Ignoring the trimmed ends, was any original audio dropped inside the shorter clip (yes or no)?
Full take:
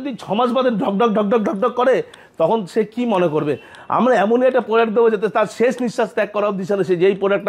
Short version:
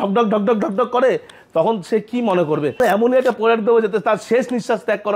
yes